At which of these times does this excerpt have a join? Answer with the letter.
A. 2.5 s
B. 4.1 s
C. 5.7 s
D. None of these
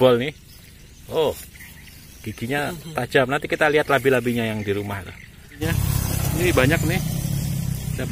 C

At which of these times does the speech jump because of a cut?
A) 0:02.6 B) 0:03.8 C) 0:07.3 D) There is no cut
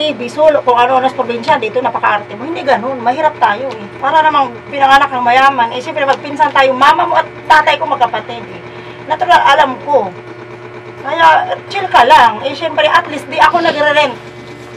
B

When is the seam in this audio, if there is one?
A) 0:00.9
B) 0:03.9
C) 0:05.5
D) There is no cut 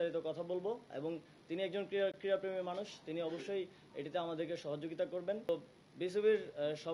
C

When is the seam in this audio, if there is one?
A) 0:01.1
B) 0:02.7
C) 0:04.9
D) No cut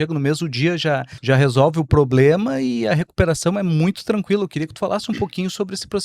A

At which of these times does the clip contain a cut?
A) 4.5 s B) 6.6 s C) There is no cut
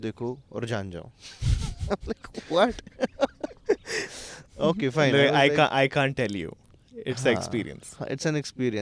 C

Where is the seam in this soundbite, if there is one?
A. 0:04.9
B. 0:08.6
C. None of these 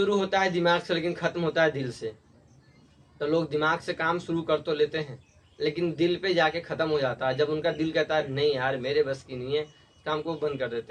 C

